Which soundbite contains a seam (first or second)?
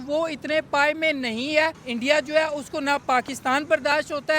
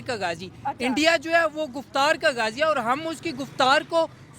first